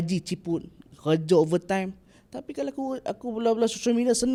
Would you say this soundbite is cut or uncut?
uncut